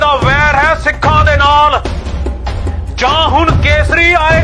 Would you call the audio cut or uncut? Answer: uncut